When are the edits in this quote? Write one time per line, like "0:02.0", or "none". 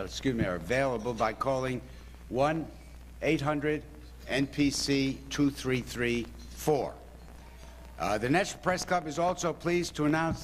0:06.0